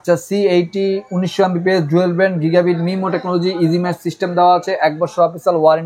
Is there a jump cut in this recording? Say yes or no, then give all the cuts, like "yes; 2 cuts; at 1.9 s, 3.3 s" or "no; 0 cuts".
no; 0 cuts